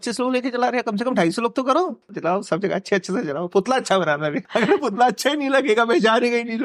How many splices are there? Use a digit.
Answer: 2